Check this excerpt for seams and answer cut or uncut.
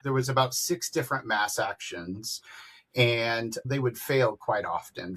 uncut